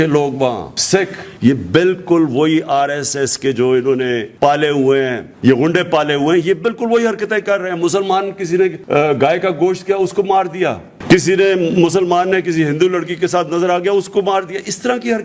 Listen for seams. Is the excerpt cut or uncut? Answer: cut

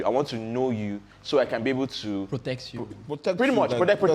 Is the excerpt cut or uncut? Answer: uncut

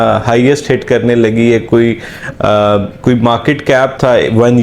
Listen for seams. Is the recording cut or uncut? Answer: uncut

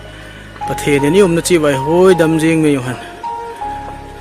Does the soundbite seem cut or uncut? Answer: cut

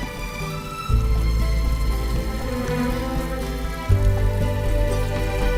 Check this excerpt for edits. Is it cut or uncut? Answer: uncut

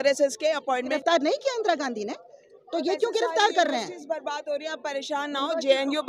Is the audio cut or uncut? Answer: cut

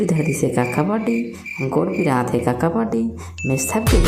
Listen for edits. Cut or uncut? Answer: uncut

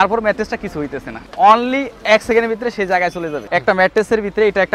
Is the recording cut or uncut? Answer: cut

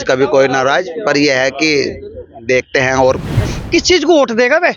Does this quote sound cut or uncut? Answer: cut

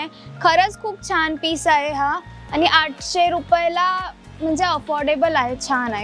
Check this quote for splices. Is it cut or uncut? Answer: uncut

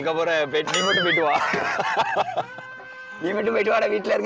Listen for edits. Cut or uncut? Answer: uncut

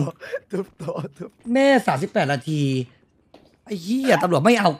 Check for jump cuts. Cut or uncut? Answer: cut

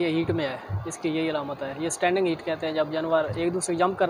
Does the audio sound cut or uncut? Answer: uncut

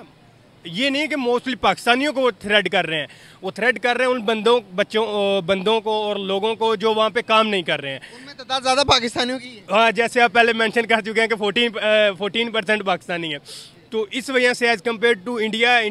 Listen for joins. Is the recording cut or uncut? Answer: uncut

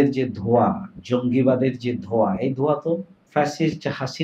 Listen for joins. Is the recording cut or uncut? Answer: cut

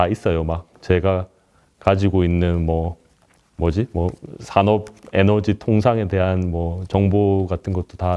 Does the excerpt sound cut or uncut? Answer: uncut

